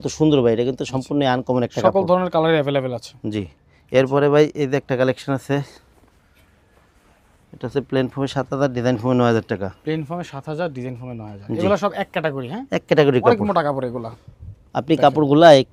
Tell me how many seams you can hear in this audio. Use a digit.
0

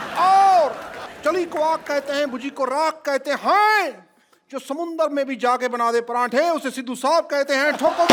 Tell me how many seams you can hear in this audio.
0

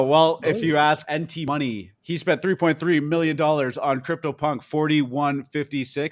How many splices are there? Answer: 2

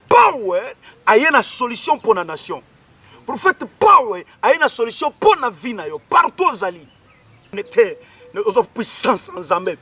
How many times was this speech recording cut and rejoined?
1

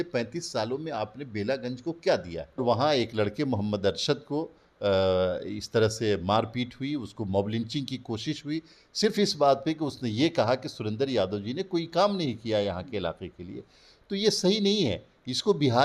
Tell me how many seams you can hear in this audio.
1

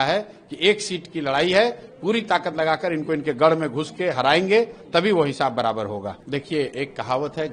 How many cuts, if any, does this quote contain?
1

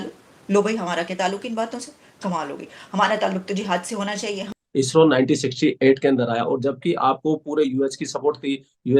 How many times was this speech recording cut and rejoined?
1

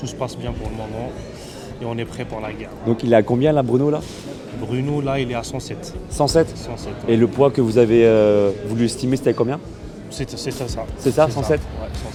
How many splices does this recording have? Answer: 0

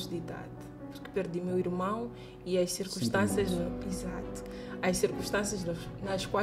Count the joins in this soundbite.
0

